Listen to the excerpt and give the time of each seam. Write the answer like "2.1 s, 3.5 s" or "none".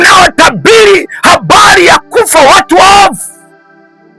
3.2 s